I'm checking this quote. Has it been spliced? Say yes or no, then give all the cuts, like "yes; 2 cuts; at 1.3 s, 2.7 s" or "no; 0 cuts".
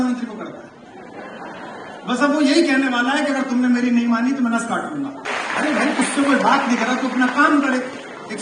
yes; 1 cut; at 5.2 s